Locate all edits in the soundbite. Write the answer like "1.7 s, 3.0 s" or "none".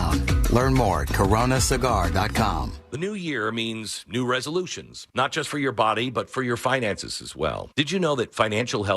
2.7 s

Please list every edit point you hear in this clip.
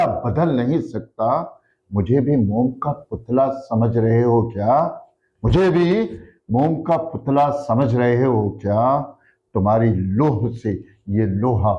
none

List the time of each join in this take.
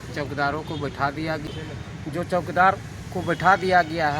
1.5 s

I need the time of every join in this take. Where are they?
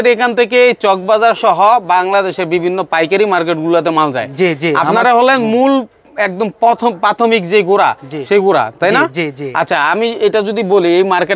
none

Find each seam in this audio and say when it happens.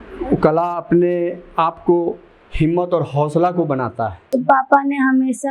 4.3 s

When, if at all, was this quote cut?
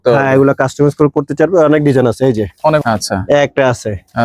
2.8 s

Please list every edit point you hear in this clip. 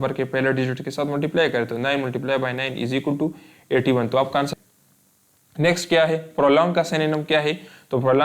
4.6 s

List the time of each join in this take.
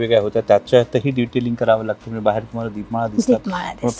none

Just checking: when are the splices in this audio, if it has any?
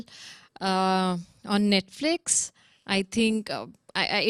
none

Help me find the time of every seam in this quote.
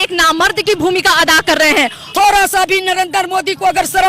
2.0 s

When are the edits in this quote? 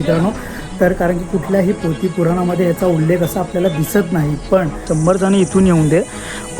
4.9 s

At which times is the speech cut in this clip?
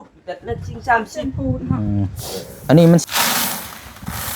3.0 s

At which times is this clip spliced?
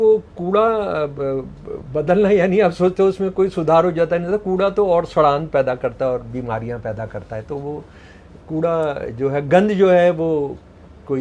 none

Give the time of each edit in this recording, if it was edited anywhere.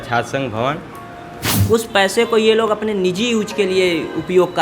1.5 s

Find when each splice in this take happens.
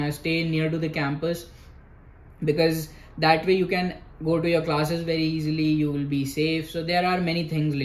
none

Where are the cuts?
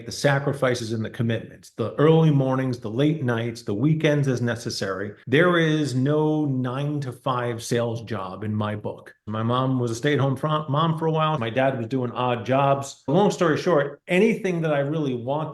9.2 s, 11.4 s

